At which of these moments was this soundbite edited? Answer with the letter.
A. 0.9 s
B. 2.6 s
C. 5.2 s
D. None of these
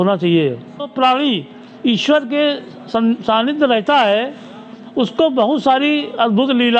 A